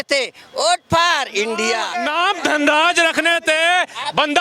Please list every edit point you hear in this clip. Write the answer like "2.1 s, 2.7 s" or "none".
1.9 s